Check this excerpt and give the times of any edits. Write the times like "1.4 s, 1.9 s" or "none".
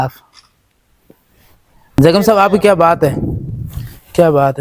2.0 s